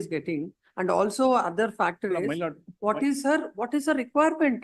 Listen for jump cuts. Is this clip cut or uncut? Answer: uncut